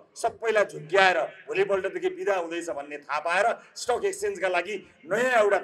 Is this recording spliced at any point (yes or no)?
no